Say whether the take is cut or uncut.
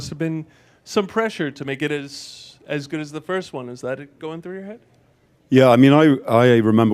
cut